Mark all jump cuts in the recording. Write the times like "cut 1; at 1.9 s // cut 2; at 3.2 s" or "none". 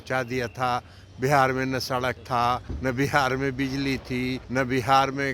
cut 1; at 2.7 s // cut 2; at 4.4 s